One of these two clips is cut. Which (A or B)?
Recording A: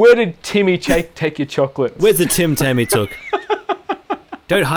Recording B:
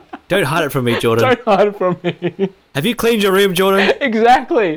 A